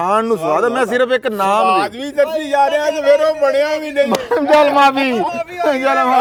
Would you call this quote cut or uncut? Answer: uncut